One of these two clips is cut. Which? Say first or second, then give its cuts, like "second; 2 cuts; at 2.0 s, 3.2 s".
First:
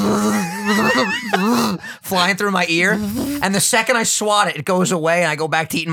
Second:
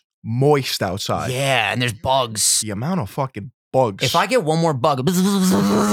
second; 1 cut; at 2.4 s